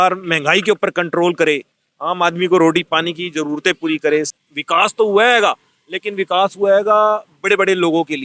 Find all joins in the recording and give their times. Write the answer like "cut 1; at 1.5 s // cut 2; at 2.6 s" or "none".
cut 1; at 4.3 s